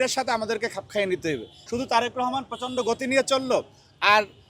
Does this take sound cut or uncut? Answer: cut